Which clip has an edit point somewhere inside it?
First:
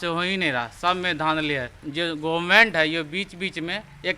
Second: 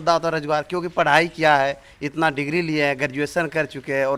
first; 1 cut; at 1.8 s

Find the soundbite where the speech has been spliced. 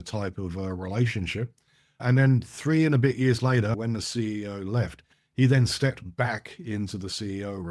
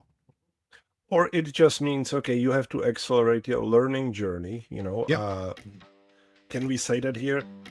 first; 2 cuts; at 2.0 s, 3.8 s

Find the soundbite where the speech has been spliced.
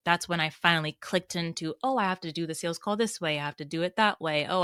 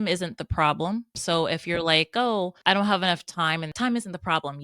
second; 3 cuts; at 1.2 s, 2.5 s, 3.7 s

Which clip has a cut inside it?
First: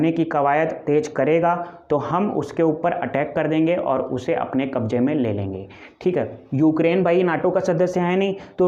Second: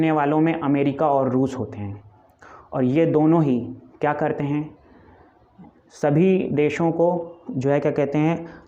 first; 1 cut; at 6.4 s

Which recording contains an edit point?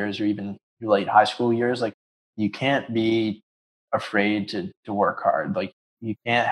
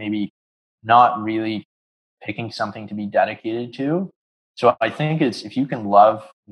first; 2 cuts; at 1.9 s, 5.7 s

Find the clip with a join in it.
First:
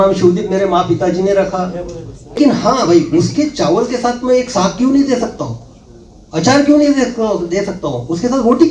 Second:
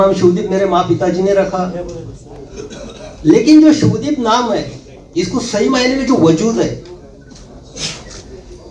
first; 1 cut; at 2.4 s

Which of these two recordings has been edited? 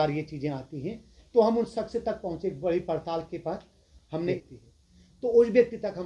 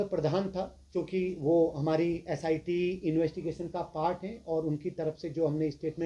first; 1 cut; at 4.4 s

